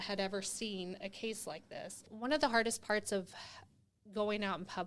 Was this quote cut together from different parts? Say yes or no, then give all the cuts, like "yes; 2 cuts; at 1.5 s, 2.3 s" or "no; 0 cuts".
yes; 1 cut; at 2.1 s